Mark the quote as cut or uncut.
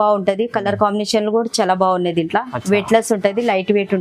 uncut